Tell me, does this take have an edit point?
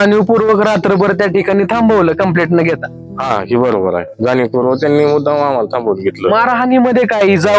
no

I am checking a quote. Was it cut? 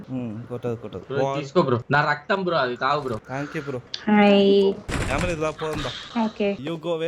yes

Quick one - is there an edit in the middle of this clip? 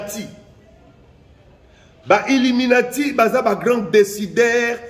no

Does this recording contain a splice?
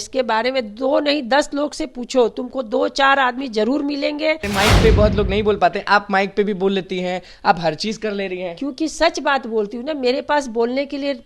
yes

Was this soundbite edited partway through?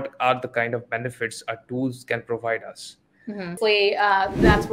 yes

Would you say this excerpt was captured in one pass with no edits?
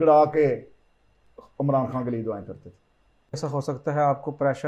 no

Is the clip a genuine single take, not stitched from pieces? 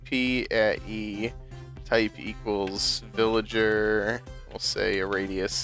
yes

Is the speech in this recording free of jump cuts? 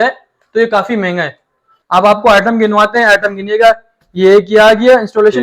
no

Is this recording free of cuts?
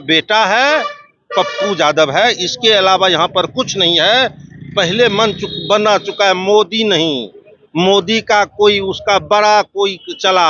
yes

